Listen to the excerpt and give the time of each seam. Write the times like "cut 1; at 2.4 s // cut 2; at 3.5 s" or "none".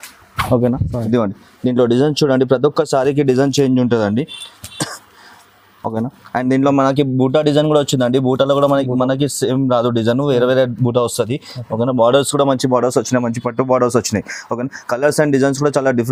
none